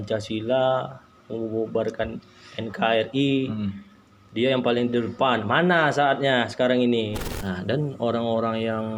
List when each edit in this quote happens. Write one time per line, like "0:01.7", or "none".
0:07.3